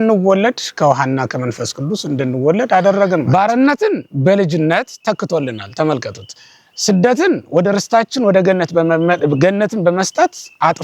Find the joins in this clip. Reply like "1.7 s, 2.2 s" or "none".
3.2 s